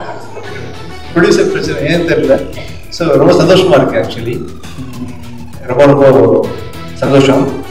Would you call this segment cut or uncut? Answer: uncut